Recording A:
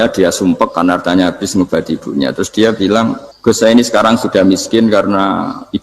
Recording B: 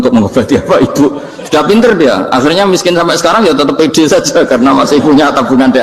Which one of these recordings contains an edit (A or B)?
A